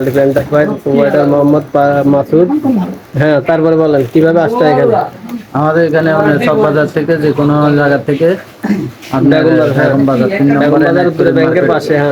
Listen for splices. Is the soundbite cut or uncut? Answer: uncut